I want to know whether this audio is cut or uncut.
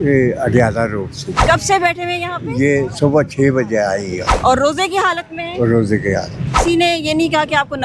cut